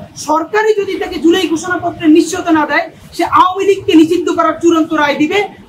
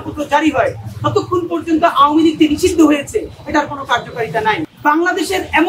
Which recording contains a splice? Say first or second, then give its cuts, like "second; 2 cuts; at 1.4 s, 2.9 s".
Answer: second; 1 cut; at 4.7 s